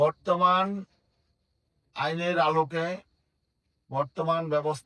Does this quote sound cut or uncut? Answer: uncut